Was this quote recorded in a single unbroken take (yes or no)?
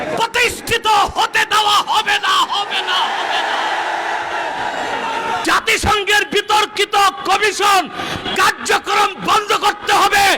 no